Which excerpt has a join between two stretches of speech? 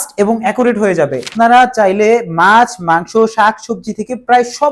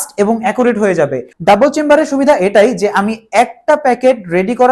first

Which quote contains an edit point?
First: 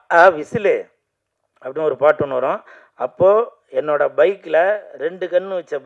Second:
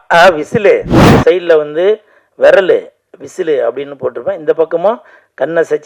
second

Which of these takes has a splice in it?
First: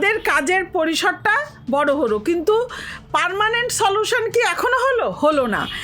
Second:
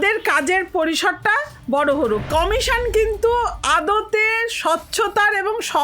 second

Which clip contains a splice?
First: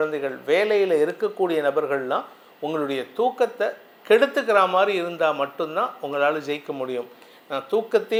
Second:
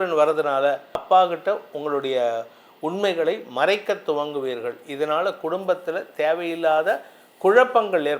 second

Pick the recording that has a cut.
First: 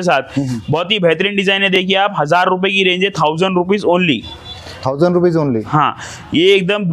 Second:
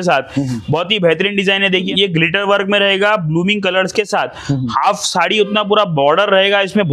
second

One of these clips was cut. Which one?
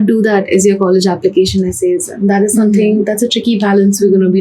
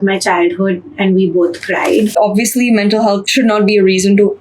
second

